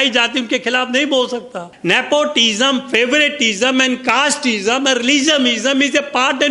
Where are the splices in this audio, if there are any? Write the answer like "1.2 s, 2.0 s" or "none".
1.7 s